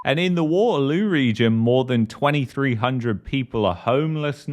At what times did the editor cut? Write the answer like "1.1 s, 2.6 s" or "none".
none

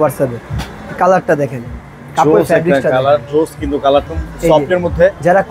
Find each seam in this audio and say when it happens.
4.1 s

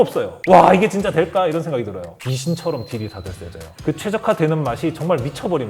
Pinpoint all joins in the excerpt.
2.0 s, 3.7 s

